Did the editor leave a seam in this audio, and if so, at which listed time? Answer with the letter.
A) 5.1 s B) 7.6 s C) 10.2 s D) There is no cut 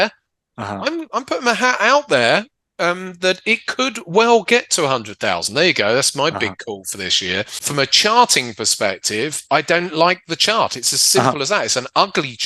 B